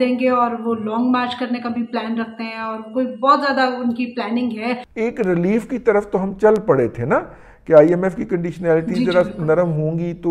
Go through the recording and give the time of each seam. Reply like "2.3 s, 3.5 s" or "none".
4.9 s

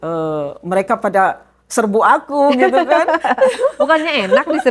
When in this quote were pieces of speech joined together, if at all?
none

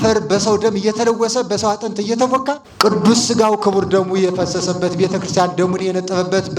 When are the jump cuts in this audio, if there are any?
2.7 s

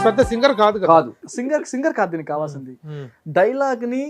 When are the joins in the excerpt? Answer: 1.2 s

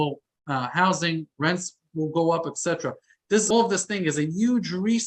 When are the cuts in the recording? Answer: 3.5 s

